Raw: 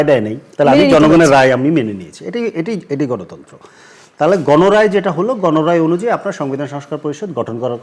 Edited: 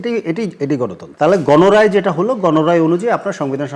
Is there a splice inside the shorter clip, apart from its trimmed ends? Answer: yes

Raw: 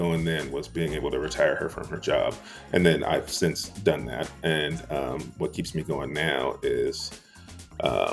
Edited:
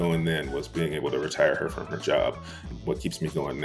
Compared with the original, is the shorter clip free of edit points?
no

